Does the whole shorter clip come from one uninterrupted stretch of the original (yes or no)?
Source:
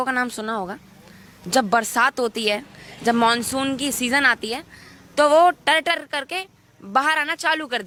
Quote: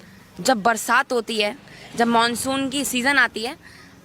yes